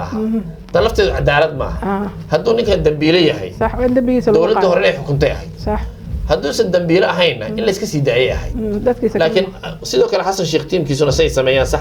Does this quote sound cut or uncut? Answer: uncut